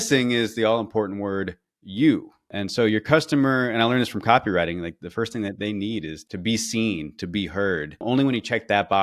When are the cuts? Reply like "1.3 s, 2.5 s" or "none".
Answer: 2.5 s, 5.0 s, 6.2 s, 8.0 s